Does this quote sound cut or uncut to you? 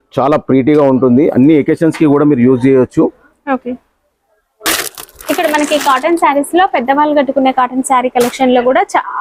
uncut